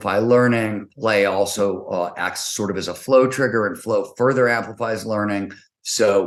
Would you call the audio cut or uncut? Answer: uncut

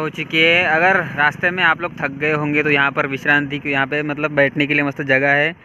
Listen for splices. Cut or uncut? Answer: uncut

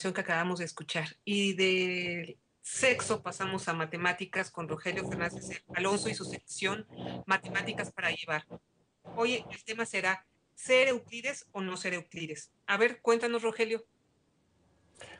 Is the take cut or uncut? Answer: uncut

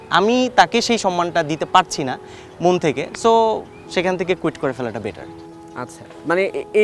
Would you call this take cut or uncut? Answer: uncut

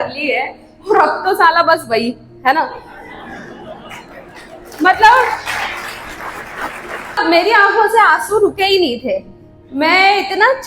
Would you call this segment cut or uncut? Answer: cut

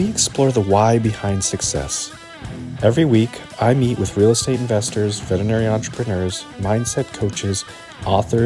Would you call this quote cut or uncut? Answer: uncut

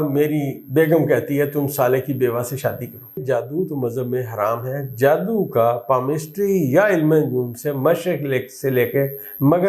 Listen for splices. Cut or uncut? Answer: cut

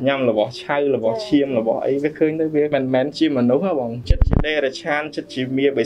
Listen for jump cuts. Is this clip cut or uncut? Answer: cut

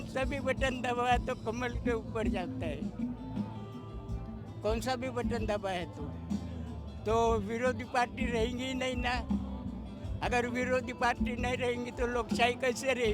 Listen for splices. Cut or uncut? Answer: uncut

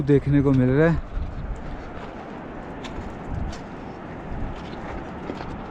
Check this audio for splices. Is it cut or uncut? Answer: uncut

